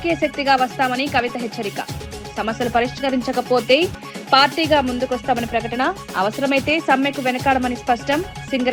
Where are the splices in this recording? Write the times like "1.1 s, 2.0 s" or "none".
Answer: none